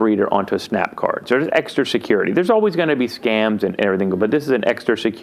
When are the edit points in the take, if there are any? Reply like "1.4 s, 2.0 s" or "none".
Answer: 1.2 s